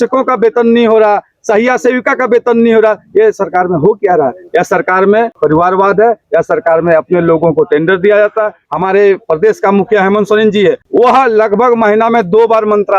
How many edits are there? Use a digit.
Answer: 3